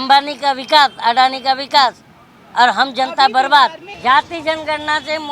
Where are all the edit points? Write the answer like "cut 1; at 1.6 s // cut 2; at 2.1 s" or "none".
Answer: cut 1; at 3.9 s